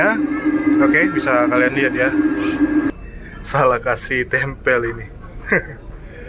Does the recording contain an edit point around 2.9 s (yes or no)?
yes